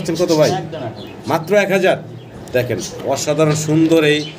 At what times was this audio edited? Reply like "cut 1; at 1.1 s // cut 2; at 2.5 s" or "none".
none